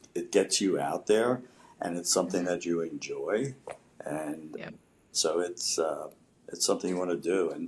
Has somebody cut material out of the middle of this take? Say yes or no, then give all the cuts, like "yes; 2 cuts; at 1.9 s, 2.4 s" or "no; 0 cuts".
no; 0 cuts